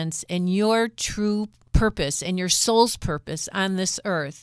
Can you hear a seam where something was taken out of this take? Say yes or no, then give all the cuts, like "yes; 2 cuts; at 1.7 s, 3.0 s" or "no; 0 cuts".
yes; 1 cut; at 1.6 s